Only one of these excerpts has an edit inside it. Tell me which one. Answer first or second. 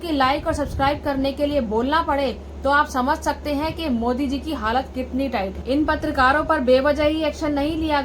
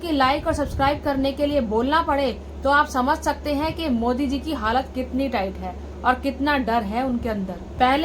first